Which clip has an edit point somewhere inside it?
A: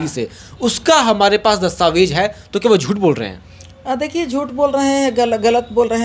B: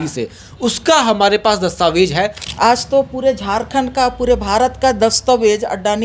B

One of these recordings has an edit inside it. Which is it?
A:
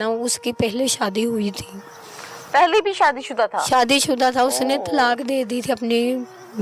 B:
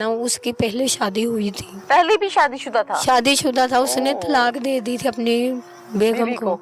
B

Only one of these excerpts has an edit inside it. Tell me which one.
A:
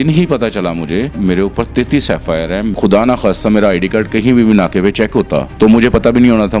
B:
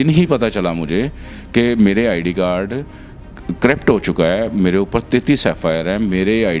A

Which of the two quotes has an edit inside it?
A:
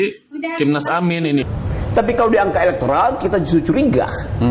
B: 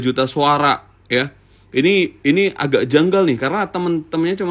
A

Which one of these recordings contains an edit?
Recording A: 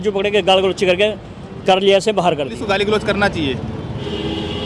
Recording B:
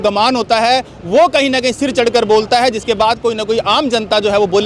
A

